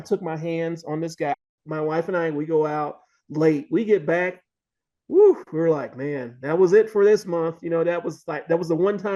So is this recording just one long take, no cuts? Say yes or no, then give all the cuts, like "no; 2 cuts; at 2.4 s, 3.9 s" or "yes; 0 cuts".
no; 1 cut; at 1.4 s